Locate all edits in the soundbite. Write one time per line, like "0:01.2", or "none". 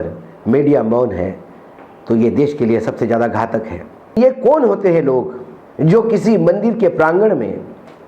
0:04.2